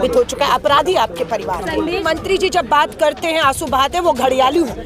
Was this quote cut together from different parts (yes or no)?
yes